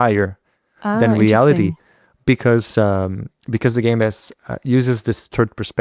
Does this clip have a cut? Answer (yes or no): no